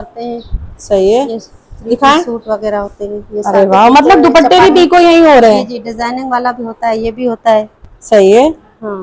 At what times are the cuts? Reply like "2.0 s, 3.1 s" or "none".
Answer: none